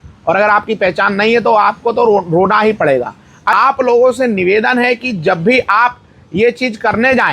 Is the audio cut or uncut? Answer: cut